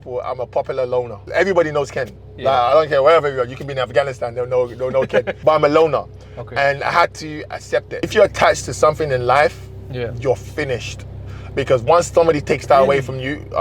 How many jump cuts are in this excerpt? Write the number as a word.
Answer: three